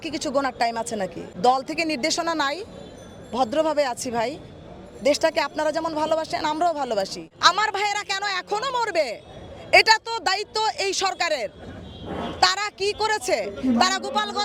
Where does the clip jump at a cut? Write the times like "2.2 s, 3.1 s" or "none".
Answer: 1.2 s, 7.2 s